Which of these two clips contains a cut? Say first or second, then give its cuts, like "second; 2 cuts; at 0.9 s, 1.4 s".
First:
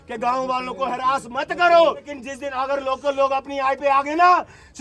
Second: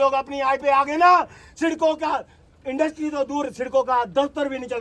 first; 1 cut; at 2.1 s